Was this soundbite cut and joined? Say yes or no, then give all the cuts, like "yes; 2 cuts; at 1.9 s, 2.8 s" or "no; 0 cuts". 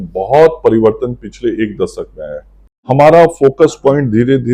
yes; 1 cut; at 2.8 s